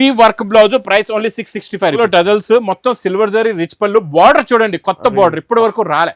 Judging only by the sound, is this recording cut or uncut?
cut